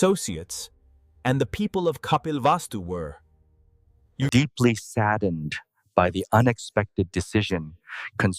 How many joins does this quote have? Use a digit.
0